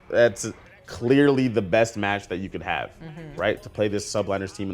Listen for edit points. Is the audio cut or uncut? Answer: uncut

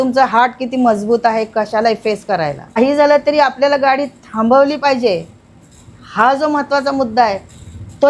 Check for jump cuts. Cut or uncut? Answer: cut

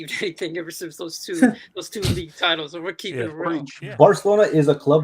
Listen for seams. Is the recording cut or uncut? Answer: cut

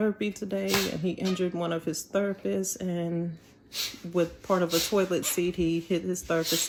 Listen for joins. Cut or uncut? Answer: uncut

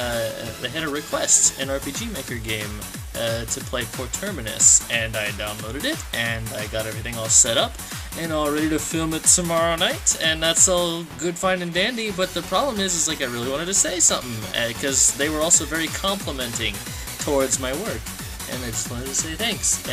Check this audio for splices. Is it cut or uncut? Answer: uncut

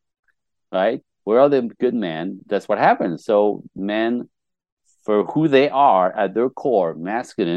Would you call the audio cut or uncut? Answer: cut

